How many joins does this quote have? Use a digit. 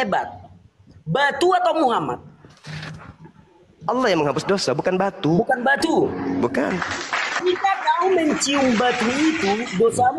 1